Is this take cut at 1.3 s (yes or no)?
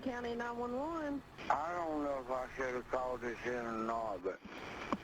yes